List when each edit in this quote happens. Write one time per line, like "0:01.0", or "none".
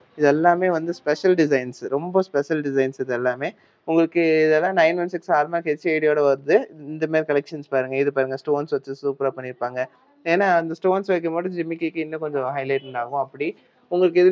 none